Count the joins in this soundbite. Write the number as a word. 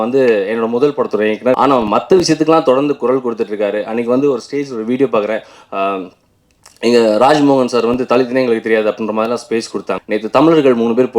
two